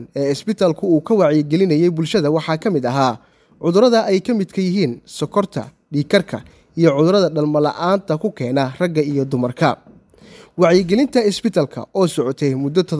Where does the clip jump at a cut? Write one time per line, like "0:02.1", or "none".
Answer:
none